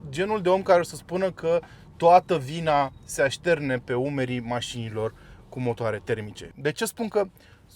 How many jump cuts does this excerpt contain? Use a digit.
1